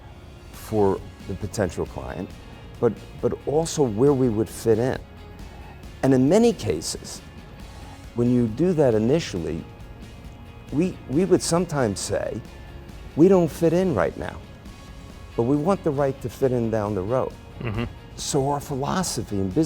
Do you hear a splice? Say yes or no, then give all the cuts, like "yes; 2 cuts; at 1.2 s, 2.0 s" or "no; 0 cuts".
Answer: yes; 1 cut; at 18.0 s